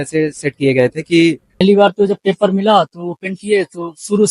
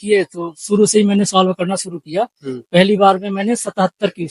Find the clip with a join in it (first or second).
first